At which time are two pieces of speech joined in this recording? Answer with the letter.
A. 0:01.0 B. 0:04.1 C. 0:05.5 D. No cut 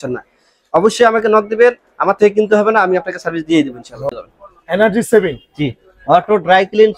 B